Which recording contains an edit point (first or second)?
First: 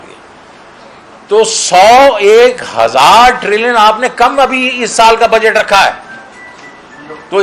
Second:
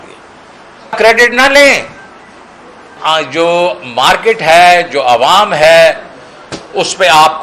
second